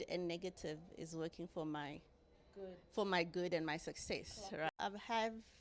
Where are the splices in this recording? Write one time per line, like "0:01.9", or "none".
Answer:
0:04.7